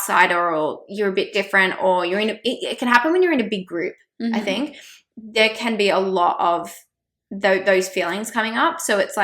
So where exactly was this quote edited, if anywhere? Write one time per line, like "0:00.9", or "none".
none